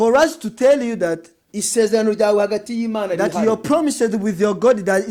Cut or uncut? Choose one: uncut